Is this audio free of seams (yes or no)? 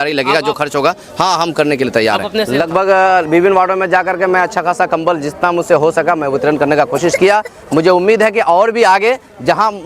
no